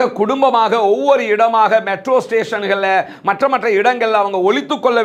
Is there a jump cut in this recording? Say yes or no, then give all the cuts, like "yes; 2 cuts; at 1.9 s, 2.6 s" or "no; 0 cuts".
no; 0 cuts